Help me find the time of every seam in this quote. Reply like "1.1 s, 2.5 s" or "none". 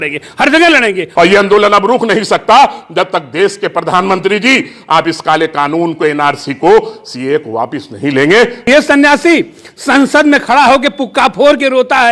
1.0 s, 8.7 s